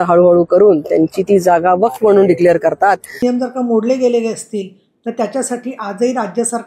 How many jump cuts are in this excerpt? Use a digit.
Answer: 1